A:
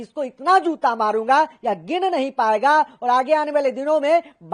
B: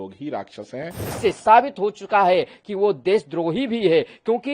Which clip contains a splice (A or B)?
B